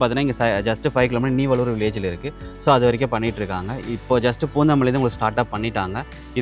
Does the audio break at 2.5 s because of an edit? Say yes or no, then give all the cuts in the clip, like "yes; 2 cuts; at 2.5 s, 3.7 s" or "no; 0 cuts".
no; 0 cuts